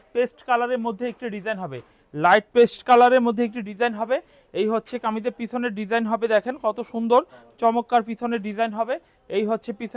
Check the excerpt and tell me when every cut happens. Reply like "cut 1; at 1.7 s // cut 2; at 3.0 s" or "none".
none